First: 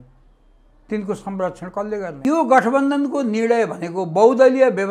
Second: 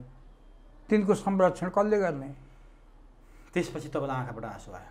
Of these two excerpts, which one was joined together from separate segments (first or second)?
first